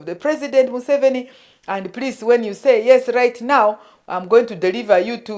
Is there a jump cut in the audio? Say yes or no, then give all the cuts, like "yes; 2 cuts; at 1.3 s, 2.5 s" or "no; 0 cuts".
no; 0 cuts